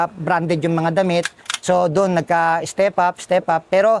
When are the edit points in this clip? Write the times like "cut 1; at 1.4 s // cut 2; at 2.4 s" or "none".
cut 1; at 1.4 s